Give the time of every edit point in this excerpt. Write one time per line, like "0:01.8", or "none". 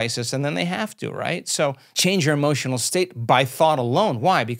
0:01.9